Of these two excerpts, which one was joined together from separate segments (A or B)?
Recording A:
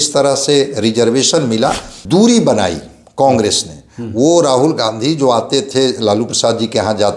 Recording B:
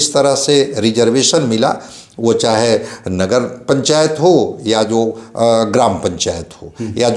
A